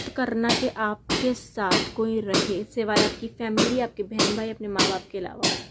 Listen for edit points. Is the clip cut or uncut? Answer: uncut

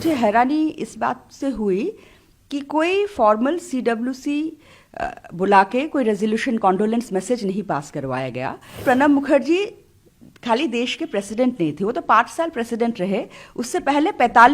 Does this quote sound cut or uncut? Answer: cut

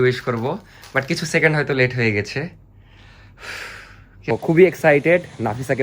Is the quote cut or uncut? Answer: cut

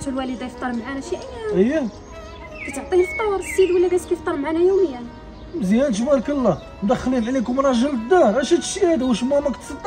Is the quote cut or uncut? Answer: uncut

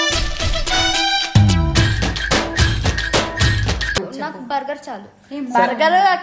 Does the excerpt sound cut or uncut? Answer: cut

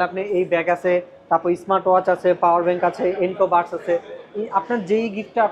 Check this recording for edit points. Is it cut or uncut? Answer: uncut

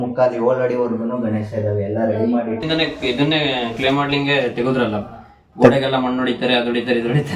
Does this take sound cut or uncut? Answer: cut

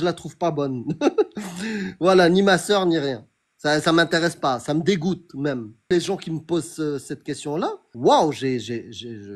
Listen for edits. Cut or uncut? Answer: cut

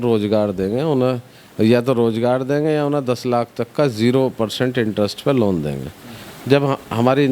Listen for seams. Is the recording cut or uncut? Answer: uncut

